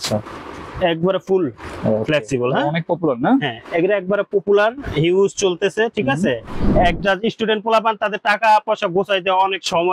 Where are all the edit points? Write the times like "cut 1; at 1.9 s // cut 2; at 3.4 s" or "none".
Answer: cut 1; at 6.6 s